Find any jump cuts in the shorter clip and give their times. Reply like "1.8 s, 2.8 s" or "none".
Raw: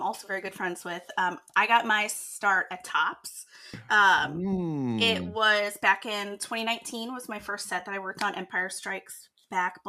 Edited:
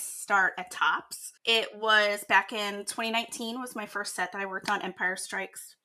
1.5 s